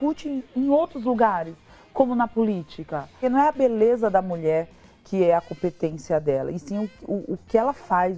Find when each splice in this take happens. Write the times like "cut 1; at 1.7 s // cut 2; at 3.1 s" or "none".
cut 1; at 3.1 s

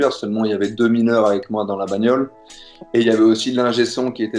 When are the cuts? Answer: none

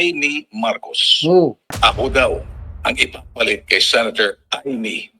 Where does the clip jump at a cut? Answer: cut 1; at 1.7 s

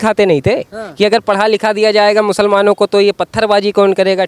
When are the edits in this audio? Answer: none

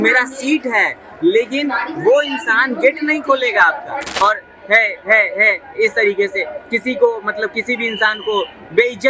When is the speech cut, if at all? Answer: cut 1; at 4.1 s

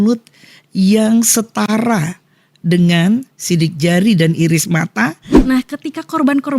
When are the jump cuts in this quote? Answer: cut 1; at 5.3 s

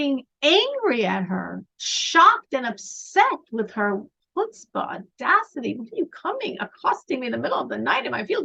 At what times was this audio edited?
none

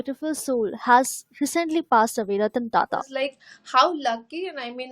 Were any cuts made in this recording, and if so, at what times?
cut 1; at 3.1 s

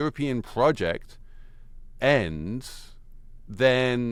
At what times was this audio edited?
none

